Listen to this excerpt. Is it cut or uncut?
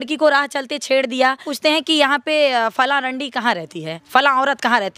cut